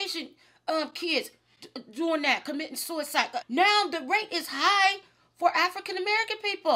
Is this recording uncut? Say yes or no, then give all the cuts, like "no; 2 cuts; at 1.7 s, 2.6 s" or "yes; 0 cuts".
no; 1 cut; at 3.3 s